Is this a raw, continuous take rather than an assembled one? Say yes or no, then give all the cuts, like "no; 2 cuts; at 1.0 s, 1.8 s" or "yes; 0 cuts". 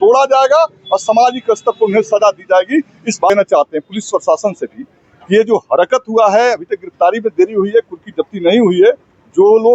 no; 1 cut; at 3.3 s